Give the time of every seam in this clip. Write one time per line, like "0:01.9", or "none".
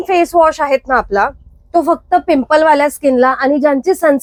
none